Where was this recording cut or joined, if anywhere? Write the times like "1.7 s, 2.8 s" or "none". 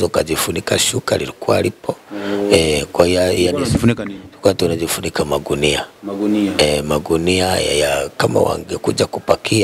none

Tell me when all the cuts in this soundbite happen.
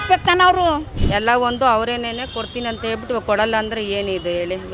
1.0 s

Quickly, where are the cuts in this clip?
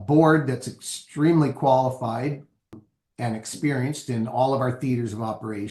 2.8 s

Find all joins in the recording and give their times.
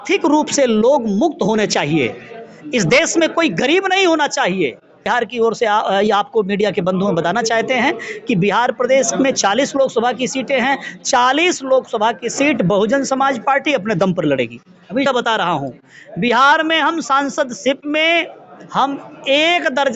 5.1 s, 15.0 s

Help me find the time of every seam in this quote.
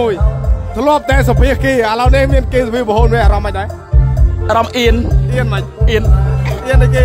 none

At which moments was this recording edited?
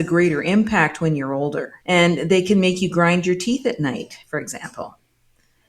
1.7 s

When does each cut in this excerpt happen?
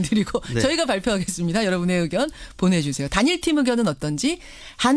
1.7 s

